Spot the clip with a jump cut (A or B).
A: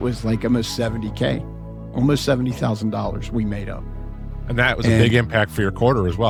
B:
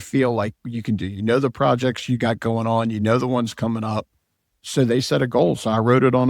B